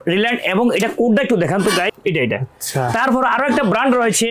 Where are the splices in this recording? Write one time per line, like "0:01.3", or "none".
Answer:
0:01.9